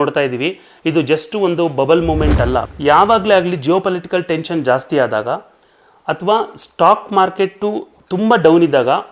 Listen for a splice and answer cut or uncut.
cut